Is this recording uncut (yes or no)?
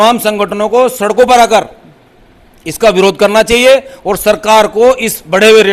yes